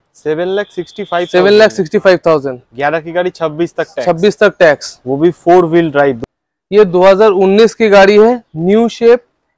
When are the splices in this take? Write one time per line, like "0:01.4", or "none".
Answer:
0:06.3